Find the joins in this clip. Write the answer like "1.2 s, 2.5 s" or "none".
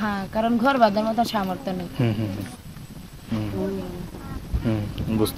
none